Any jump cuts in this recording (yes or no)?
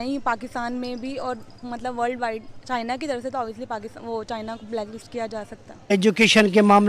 yes